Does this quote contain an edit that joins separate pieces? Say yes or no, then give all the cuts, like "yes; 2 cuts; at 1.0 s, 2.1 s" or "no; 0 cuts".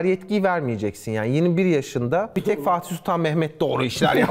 no; 0 cuts